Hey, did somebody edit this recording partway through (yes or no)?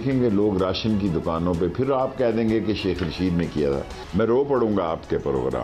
no